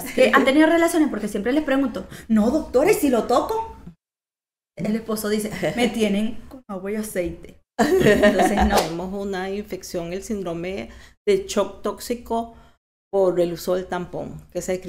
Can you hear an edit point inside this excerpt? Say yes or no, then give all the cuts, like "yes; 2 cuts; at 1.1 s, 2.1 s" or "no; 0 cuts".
yes; 1 cut; at 8.8 s